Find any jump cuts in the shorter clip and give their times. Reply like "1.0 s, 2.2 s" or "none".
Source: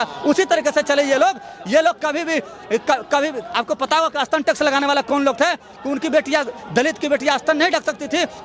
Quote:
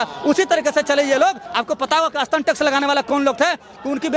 1.5 s